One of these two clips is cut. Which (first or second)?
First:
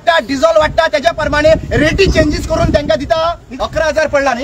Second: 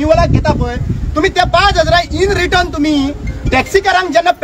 first